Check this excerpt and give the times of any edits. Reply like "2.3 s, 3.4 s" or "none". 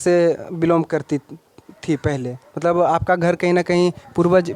none